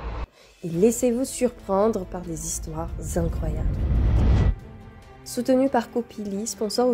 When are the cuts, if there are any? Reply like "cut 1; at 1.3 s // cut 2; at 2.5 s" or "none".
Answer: none